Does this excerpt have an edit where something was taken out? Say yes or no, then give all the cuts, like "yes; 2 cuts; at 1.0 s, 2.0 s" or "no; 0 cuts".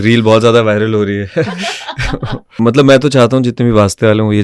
yes; 1 cut; at 2.6 s